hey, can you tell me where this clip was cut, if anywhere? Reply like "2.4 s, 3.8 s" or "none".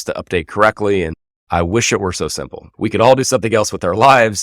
1.3 s, 2.6 s